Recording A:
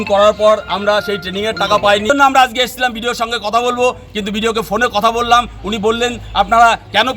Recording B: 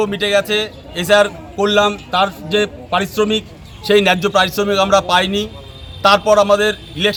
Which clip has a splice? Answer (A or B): A